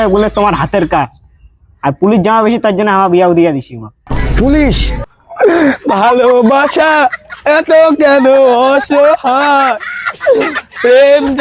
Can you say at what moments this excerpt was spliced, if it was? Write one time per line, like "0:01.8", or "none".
0:05.1